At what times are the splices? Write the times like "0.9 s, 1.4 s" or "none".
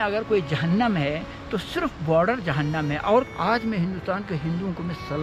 3.3 s